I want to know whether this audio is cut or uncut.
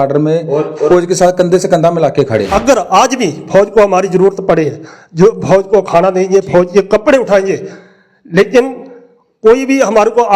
cut